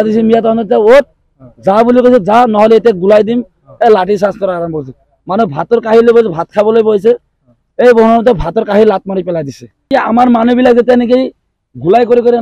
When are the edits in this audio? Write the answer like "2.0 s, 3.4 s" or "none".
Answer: 9.9 s